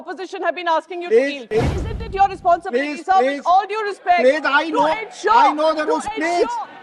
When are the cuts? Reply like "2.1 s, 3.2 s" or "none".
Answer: 1.5 s